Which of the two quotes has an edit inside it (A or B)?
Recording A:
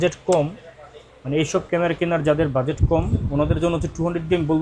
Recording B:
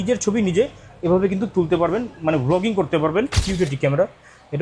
B